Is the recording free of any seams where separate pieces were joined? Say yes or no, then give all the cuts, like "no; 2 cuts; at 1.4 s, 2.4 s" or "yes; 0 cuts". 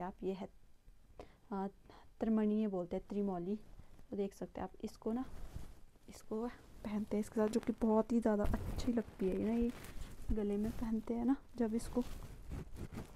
yes; 0 cuts